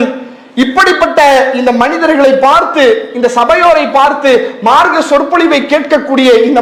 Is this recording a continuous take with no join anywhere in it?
yes; 0 cuts

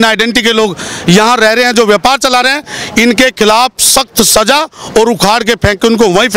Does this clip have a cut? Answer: no; 0 cuts

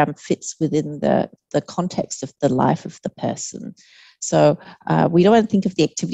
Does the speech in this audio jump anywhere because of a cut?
no; 0 cuts

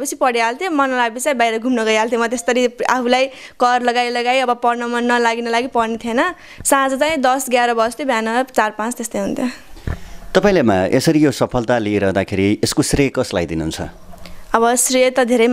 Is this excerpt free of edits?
yes; 0 cuts

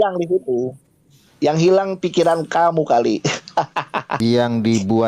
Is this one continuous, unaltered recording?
no; 1 cut; at 4.0 s

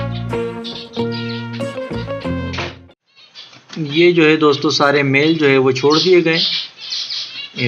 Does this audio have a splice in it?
yes; 1 cut; at 2.9 s

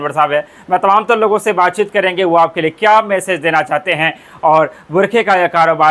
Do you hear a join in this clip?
no; 0 cuts

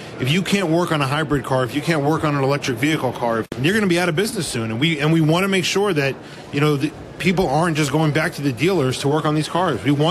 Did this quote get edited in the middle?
yes; 1 cut; at 3.5 s

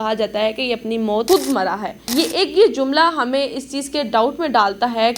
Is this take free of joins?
no; 2 cuts; at 1.2 s, 1.9 s

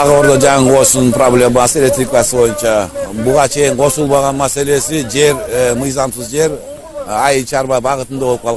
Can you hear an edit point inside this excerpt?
no; 0 cuts

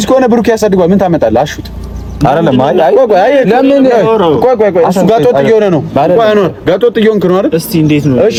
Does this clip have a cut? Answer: no; 0 cuts

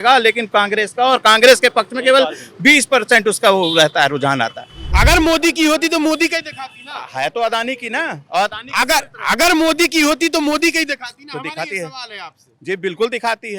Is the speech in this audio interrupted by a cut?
no; 0 cuts

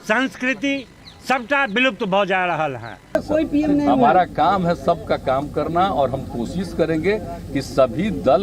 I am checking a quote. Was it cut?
yes; 1 cut; at 3.2 s

